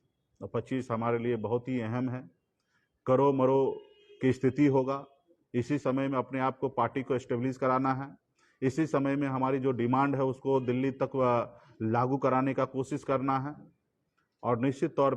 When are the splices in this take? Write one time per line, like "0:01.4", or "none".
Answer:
none